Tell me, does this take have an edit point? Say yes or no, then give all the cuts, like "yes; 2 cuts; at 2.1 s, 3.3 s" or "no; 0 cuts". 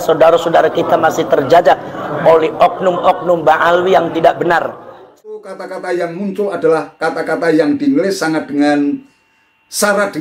yes; 1 cut; at 5.2 s